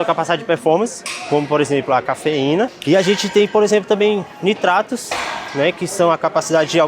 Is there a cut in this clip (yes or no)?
yes